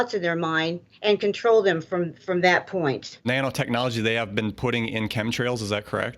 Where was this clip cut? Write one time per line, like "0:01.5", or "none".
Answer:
0:03.2